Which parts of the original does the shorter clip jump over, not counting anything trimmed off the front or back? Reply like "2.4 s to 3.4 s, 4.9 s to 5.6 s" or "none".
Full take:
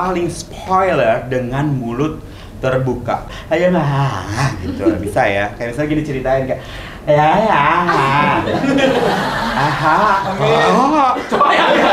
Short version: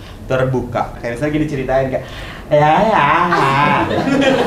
3.3 s to 5.6 s